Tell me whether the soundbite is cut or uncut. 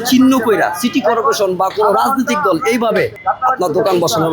cut